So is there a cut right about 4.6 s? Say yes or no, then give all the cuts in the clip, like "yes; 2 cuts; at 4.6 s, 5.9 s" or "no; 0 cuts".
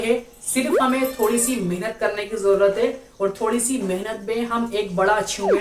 no; 0 cuts